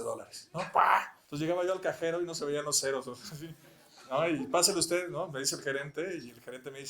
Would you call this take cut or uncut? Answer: cut